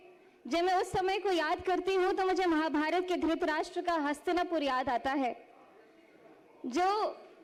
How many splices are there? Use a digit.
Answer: 0